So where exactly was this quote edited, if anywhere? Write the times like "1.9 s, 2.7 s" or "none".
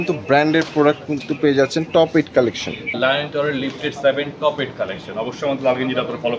3.0 s

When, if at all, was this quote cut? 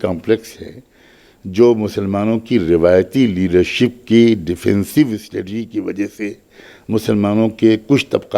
none

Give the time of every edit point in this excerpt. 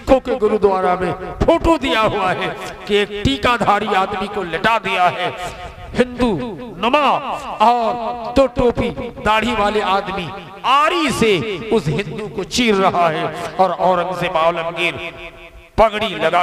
none

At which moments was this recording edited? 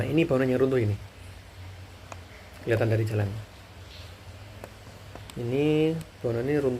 none

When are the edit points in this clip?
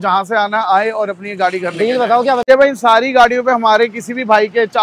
2.4 s

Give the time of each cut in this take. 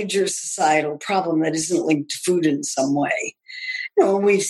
none

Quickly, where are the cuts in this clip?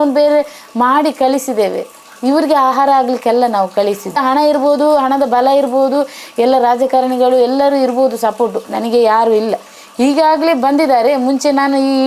none

